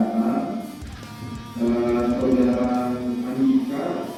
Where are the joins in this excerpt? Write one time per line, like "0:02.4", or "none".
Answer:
none